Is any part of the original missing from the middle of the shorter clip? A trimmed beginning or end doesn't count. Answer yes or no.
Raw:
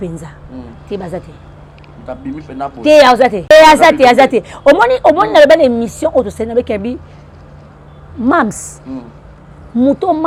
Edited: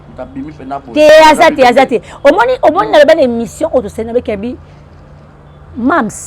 yes